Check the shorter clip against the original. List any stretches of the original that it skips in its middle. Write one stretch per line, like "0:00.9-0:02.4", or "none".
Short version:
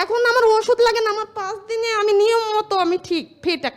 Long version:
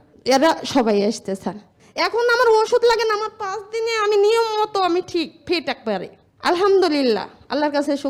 none